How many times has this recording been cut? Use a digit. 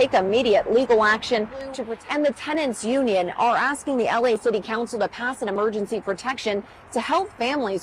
1